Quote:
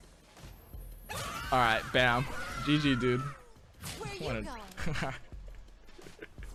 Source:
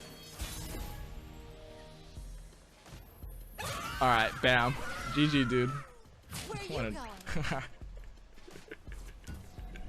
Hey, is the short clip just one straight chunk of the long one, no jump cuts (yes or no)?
yes